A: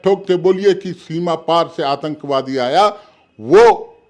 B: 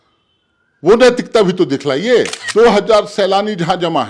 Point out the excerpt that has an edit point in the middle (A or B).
B